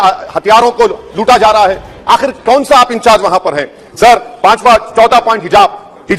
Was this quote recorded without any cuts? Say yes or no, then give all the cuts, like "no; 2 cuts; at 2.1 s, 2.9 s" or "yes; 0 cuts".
yes; 0 cuts